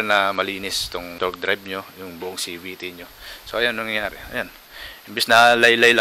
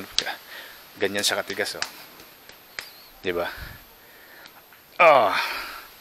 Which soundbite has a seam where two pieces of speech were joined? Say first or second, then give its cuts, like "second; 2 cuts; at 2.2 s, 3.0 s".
first; 1 cut; at 1.1 s